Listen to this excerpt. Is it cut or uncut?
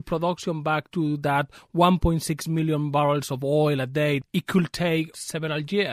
cut